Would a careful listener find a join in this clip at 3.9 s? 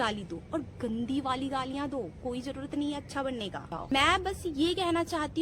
yes; 1 cut; at 3.9 s

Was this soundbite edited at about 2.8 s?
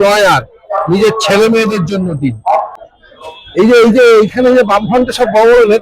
yes; 1 cut; at 2.8 s

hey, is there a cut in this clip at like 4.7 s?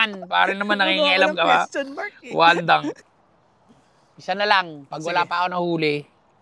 no; 1 cut; at 3.1 s

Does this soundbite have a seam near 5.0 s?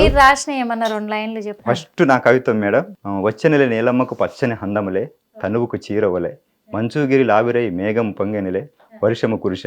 no; 2 cuts; at 1.5 s, 3.0 s

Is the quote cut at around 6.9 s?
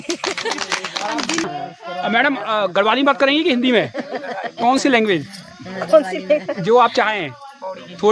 no; 1 cut; at 1.5 s

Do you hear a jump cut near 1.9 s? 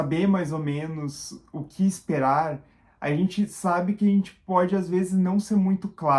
no; 0 cuts

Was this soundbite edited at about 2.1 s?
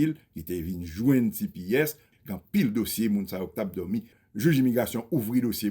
no; 1 cut; at 4.2 s

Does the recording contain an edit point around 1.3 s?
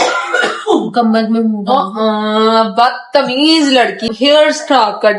no; 1 cut; at 4.1 s

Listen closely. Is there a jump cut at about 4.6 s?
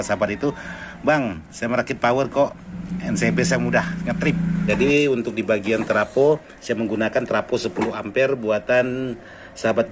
yes; 1 cut; at 4.6 s

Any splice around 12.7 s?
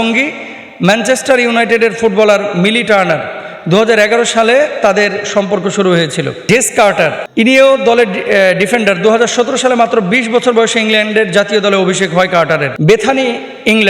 yes; 3 cuts; at 6.4 s, 7.2 s, 12.7 s

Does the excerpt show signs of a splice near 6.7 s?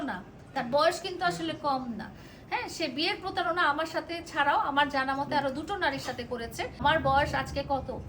yes; 1 cut; at 6.7 s

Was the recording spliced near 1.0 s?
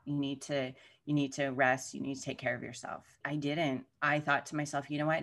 no; 1 cut; at 3.2 s

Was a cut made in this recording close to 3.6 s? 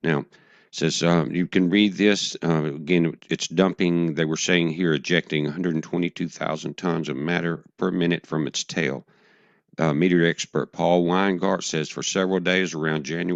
yes; 1 cut; at 3.6 s

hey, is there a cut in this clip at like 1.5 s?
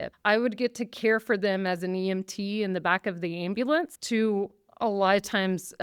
no; 1 cut; at 4.0 s

